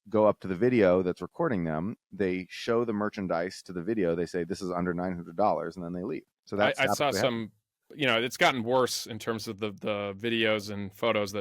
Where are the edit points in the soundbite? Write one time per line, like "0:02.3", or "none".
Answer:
0:06.3